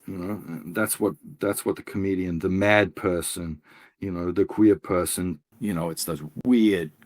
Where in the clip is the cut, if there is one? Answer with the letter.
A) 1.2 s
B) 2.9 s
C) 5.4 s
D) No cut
C